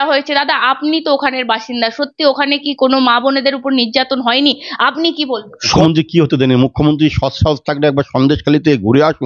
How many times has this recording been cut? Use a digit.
1